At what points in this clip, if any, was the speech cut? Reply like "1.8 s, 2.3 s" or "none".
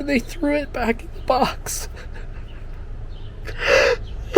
2.8 s